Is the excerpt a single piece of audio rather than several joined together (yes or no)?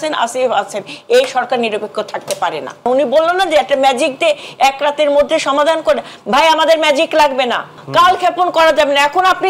no